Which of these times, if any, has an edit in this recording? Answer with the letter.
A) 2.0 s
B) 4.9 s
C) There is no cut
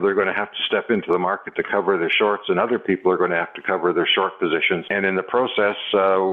B